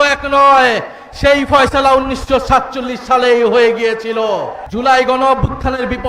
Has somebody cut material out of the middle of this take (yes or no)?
yes